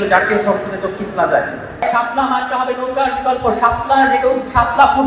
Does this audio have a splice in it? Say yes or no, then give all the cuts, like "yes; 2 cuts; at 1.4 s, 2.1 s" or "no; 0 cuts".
yes; 1 cut; at 1.8 s